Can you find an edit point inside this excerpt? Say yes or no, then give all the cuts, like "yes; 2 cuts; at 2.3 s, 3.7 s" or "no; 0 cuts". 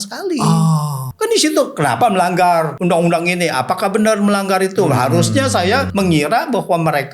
yes; 3 cuts; at 1.0 s, 2.7 s, 5.9 s